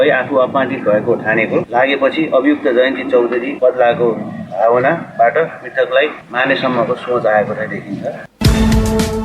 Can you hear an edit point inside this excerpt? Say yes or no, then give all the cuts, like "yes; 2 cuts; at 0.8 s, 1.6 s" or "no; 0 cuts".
yes; 1 cut; at 8.3 s